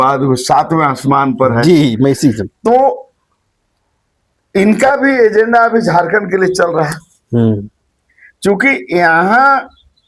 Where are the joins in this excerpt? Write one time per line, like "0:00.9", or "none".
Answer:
none